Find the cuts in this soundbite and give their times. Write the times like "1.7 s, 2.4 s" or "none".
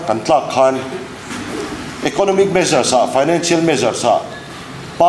none